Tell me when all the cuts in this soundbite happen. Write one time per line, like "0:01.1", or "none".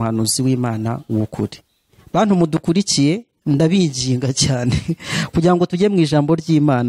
none